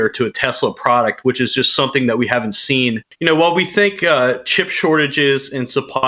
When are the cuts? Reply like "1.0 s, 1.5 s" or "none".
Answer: 3.1 s

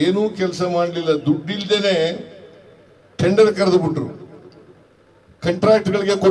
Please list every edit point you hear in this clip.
none

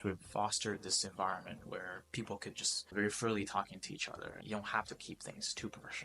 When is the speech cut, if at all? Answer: none

